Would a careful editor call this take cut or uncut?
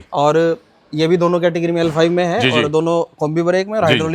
uncut